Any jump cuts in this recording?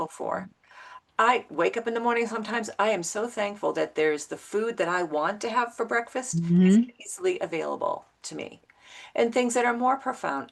no; 0 cuts

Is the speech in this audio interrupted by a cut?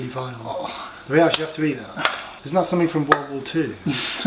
no; 0 cuts

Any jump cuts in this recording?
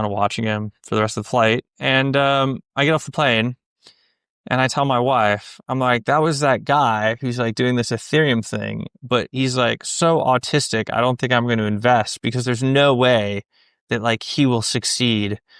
no; 0 cuts

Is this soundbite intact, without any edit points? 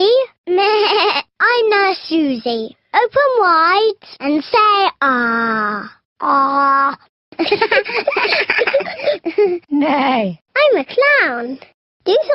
no; 1 cut; at 1.5 s

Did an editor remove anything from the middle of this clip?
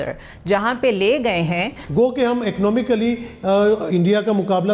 yes; 1 cut; at 1.9 s

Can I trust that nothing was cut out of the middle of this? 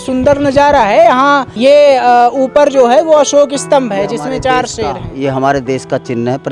no; 1 cut; at 1.5 s

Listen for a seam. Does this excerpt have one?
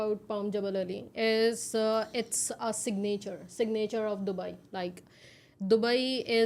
no; 0 cuts

